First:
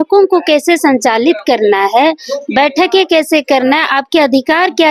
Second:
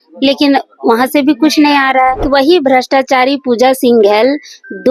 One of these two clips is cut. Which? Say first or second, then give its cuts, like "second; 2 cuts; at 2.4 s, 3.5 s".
second; 1 cut; at 2.2 s